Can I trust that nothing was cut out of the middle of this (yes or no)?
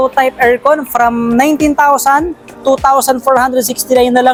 yes